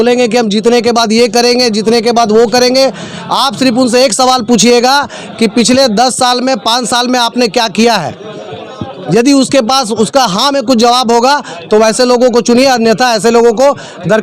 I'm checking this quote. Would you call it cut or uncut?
uncut